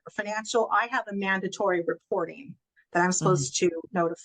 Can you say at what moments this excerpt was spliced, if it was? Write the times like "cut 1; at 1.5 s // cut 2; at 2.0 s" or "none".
none